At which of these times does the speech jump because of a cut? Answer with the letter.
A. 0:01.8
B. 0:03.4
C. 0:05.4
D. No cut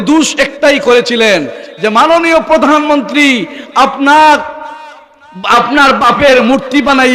D